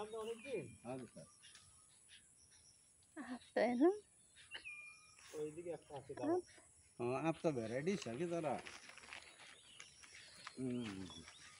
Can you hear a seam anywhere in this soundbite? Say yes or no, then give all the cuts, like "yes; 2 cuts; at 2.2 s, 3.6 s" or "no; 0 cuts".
no; 0 cuts